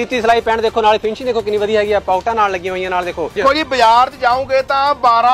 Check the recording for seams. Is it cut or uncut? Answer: cut